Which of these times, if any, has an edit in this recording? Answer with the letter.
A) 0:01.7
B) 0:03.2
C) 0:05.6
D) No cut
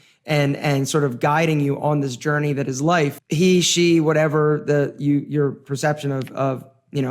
B